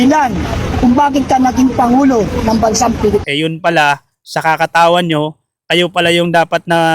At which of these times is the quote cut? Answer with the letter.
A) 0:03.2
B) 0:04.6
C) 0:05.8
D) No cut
A